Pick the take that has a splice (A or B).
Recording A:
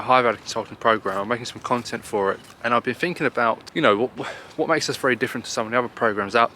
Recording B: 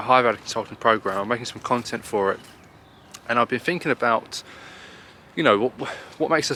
A